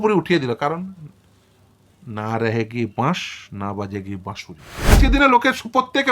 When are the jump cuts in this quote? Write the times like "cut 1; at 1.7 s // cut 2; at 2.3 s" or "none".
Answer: cut 1; at 4.9 s